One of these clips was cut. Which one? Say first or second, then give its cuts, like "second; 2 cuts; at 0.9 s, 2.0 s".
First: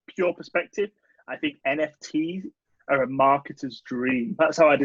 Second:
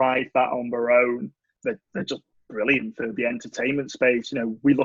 second; 1 cut; at 1.5 s